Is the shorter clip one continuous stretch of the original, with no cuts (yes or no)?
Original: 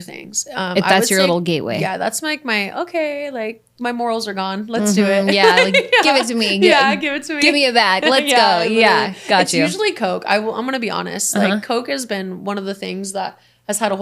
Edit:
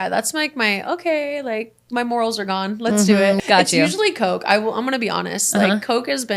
no